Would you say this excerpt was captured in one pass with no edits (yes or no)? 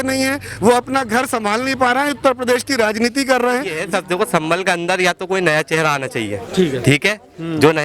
no